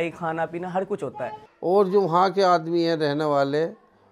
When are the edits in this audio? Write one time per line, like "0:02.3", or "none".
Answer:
0:01.3